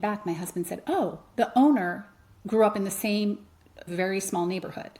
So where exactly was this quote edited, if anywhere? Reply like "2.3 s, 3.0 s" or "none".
3.9 s